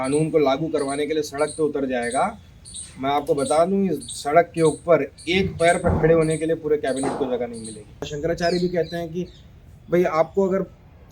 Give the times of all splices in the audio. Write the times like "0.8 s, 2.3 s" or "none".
8.1 s